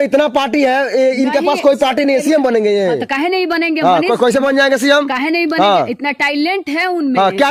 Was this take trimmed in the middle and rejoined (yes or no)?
no